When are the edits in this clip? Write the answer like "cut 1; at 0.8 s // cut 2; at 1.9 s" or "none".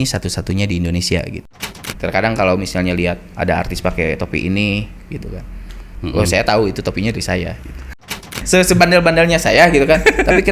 cut 1; at 1.7 s // cut 2; at 8.2 s